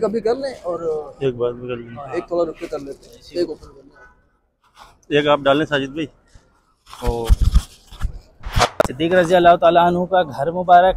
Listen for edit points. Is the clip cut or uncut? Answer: cut